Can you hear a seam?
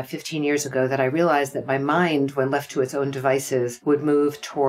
yes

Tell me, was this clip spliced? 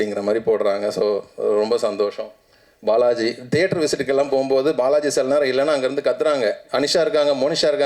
no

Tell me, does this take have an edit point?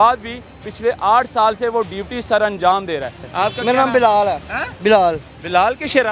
yes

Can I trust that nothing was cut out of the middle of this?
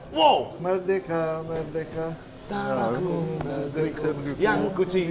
yes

